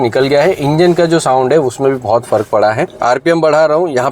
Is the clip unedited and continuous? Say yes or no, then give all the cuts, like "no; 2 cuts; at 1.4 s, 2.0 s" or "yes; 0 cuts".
no; 1 cut; at 2.9 s